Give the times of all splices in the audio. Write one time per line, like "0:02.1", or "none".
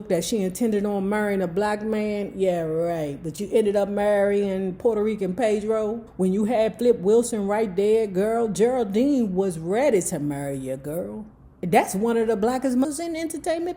0:06.1
0:12.9